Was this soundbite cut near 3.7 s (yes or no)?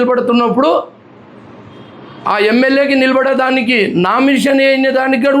no